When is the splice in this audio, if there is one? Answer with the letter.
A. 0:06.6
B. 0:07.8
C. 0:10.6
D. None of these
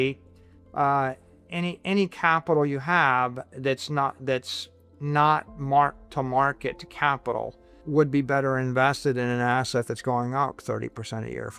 B